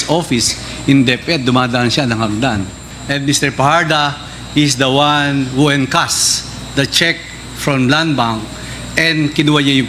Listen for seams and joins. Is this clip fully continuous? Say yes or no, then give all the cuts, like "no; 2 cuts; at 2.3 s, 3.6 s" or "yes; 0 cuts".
no; 1 cut; at 2.8 s